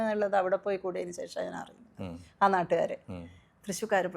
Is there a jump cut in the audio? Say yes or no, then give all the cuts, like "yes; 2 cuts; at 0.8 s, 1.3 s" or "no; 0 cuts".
no; 0 cuts